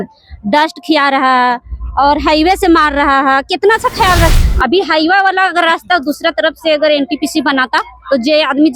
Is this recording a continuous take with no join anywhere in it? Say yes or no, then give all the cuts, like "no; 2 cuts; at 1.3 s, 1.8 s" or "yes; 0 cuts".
no; 1 cut; at 4.3 s